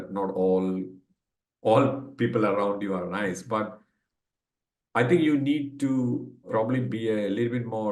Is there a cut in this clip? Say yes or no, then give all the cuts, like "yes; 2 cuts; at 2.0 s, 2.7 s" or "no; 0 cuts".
no; 0 cuts